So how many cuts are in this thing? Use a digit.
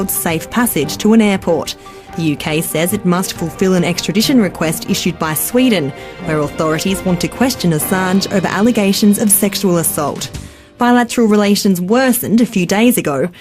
1